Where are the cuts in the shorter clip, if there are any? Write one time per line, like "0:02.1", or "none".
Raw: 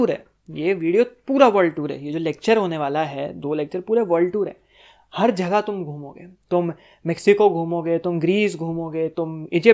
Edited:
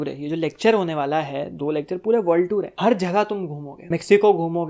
0:02.7
0:03.7